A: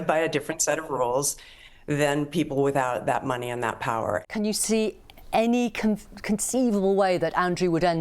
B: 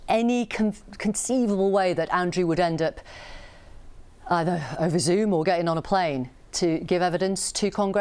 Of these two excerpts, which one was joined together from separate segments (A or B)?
A